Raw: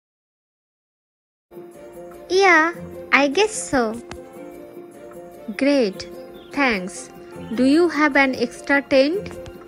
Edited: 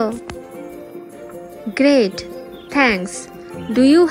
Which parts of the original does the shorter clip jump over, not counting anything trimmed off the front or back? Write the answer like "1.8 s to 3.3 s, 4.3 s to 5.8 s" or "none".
none

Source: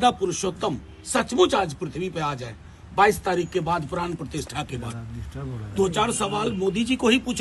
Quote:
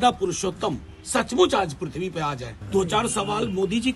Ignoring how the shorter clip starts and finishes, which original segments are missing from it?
2.5 s to 5.6 s

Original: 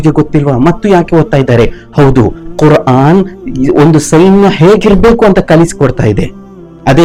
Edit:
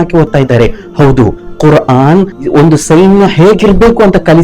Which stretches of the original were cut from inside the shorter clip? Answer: 3.4 s to 3.6 s

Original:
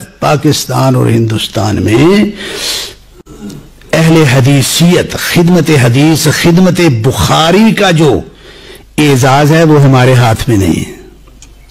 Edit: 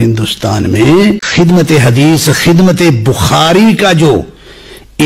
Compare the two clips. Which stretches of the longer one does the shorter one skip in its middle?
2.4 s to 5.2 s

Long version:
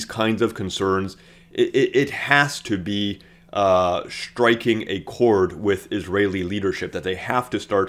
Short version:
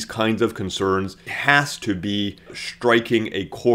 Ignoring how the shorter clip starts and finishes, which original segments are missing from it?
1.3 s to 2.2 s, 3.4 s to 4.1 s

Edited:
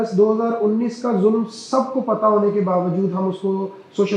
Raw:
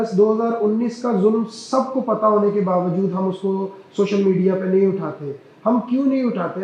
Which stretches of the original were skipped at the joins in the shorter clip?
none

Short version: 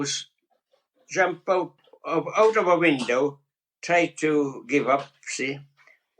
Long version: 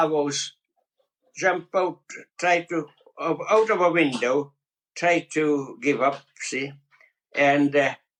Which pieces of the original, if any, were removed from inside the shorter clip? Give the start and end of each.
2.2 s to 3.0 s

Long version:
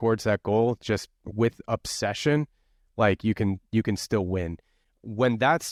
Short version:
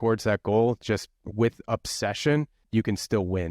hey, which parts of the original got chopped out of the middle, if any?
2.6 s to 3.6 s

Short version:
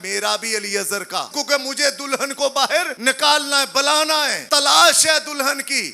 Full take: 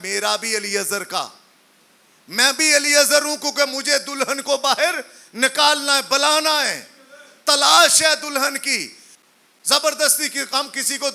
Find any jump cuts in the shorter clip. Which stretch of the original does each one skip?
1.3 s to 3.4 s, 5.0 s to 5.3 s, 6.7 s to 7.3 s

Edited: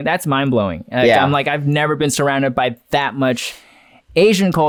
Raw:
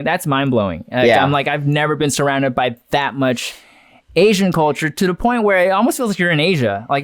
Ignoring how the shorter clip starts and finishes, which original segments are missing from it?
none

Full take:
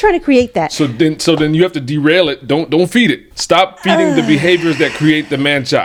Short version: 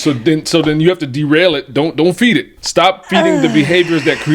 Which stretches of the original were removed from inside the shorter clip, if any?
none

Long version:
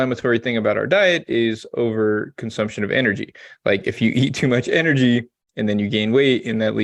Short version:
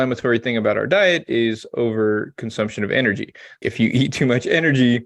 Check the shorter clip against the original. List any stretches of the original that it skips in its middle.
3.6 s to 3.8 s

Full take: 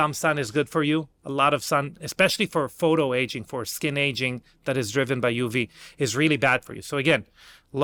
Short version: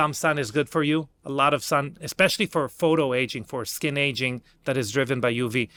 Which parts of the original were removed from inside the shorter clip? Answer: none

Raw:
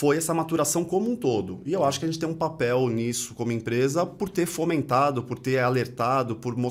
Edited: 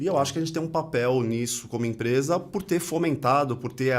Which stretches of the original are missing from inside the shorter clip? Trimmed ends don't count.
none

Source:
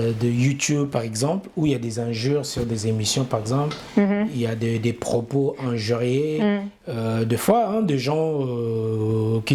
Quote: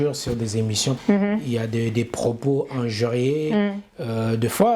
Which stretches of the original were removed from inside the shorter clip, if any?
3.3 s to 3.9 s

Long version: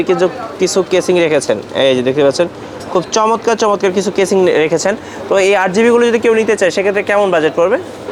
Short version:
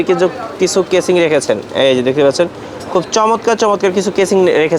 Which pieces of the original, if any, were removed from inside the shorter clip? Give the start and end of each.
none

